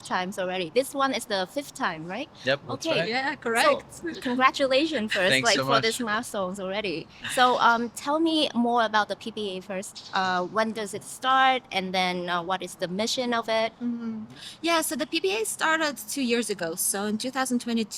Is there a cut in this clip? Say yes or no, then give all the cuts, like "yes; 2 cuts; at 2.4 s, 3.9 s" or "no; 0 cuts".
no; 0 cuts